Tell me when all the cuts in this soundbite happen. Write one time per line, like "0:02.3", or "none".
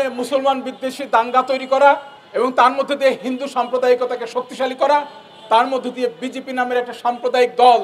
0:02.2